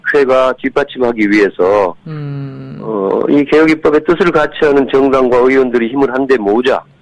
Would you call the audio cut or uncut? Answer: uncut